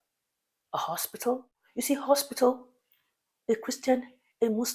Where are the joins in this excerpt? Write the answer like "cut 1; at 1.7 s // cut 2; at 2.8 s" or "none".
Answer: cut 1; at 1.6 s